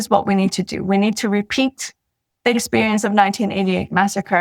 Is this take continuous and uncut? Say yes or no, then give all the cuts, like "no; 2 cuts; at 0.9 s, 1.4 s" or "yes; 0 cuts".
yes; 0 cuts